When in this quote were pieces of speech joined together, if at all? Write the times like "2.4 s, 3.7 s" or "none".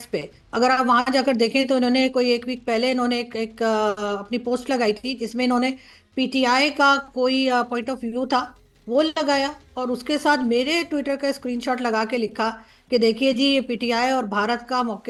none